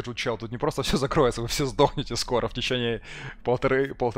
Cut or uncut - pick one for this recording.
uncut